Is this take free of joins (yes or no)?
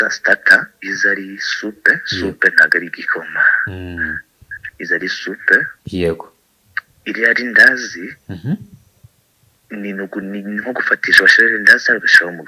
yes